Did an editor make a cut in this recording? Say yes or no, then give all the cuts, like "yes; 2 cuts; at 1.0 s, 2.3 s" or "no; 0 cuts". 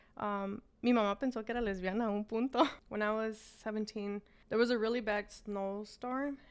yes; 2 cuts; at 2.8 s, 4.3 s